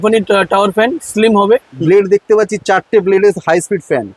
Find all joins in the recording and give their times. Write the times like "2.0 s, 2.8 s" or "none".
1.7 s